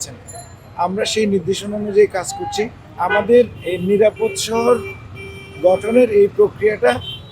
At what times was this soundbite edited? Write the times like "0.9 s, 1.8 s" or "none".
2.8 s